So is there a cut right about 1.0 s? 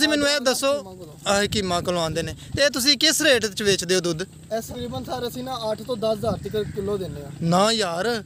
no; 0 cuts

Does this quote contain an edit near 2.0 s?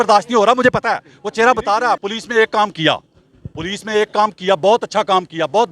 yes; 1 cut; at 2.0 s

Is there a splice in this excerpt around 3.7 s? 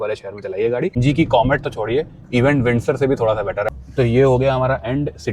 yes; 2 cuts; at 1.0 s, 3.7 s

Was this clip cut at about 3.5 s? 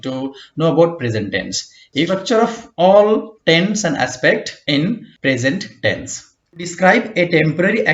no; 3 cuts; at 2.1 s, 4.8 s, 6.7 s

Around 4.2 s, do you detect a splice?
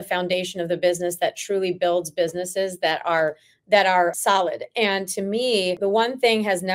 yes; 2 cuts; at 4.2 s, 5.8 s

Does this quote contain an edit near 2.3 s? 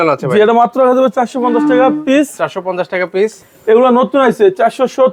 no; 0 cuts

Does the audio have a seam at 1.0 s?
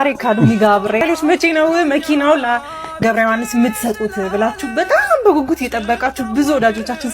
yes; 1 cut; at 1.0 s

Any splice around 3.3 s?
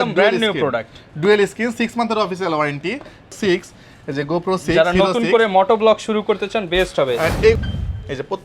yes; 2 cuts; at 3.3 s, 7.6 s

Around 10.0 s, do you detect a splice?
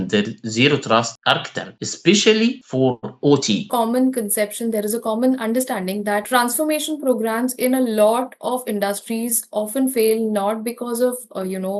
no; 1 cut; at 3.7 s

